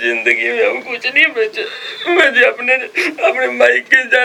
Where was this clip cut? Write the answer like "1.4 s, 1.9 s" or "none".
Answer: none